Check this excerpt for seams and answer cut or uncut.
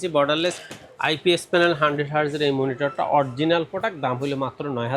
uncut